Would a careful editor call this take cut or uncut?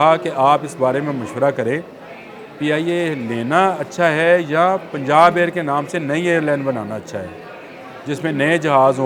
uncut